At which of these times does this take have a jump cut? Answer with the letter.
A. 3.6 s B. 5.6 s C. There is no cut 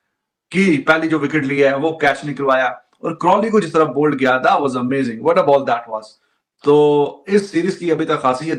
C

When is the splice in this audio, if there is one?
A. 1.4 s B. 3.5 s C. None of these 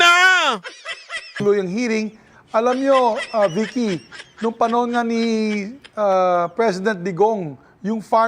A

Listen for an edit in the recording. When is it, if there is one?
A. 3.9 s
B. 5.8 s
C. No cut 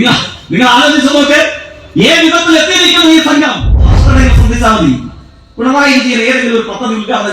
A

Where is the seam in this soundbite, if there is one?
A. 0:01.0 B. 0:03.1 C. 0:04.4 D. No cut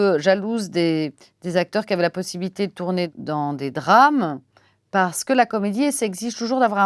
B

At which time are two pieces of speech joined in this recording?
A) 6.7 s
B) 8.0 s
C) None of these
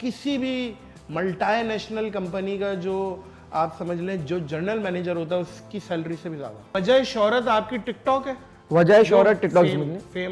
A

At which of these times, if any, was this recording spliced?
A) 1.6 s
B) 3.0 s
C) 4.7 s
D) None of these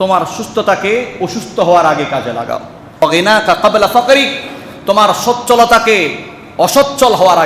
B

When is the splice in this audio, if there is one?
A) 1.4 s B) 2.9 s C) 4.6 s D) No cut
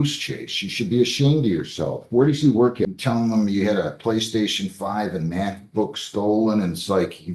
B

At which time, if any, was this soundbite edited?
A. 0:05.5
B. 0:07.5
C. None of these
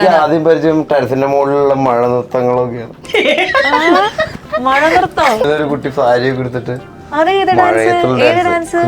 A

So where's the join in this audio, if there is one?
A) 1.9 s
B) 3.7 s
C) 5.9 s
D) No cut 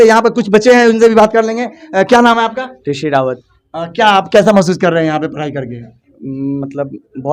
D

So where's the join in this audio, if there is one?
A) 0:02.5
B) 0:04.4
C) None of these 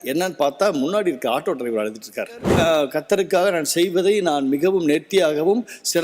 A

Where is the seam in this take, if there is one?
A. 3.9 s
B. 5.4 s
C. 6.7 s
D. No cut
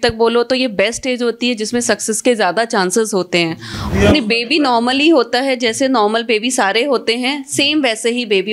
A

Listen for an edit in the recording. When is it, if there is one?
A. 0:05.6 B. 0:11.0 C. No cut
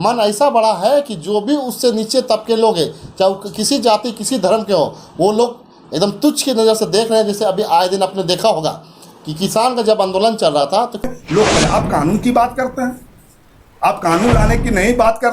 B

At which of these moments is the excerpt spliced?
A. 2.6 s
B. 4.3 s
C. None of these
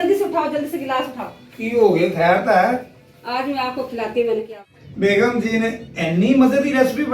B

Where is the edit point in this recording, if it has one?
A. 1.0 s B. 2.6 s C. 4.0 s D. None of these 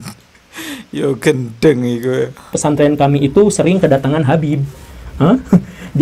B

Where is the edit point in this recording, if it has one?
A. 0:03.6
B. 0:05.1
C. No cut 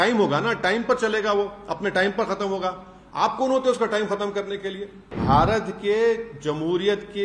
B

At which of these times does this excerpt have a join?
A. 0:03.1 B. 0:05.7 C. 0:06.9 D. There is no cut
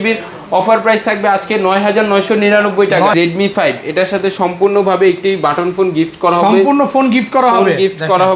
A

